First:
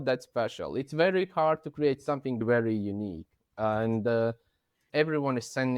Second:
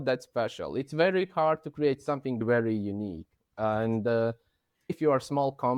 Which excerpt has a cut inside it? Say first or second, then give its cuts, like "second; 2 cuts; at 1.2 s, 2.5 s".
first; 1 cut; at 4.8 s